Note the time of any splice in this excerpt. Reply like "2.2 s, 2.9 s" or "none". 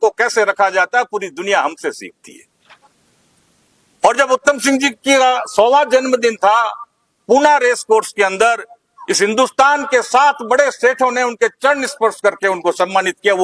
none